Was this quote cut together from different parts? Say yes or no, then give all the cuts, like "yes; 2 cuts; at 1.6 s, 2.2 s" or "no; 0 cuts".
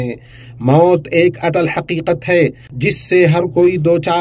yes; 1 cut; at 2.7 s